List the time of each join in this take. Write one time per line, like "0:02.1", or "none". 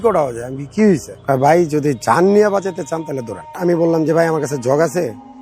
0:01.1
0:03.6